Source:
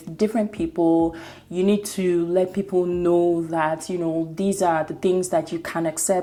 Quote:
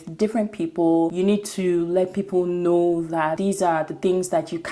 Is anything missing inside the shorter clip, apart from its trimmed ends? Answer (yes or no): yes